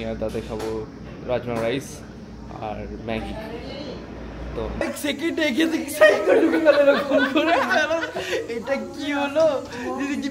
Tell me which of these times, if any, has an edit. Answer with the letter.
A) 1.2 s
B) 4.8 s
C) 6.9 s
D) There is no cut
B